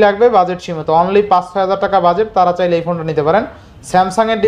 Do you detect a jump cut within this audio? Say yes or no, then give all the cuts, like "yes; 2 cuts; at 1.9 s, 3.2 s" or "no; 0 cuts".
no; 0 cuts